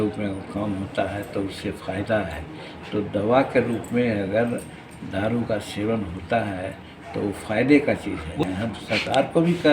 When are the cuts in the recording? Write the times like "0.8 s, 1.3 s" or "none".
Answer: 8.4 s